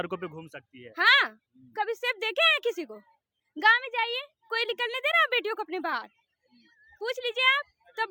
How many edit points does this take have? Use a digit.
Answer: 0